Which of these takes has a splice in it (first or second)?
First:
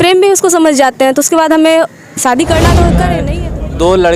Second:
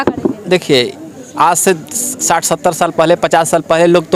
first